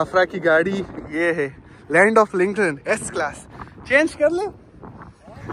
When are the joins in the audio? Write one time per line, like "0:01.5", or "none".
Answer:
none